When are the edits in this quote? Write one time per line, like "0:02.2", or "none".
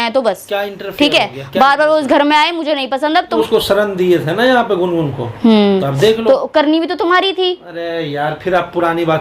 0:03.3